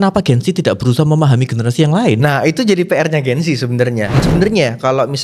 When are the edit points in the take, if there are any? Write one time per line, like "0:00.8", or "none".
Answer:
0:04.2